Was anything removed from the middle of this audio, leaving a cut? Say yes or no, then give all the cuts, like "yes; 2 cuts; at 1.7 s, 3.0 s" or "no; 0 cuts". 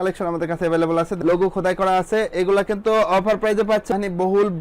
yes; 2 cuts; at 1.1 s, 3.9 s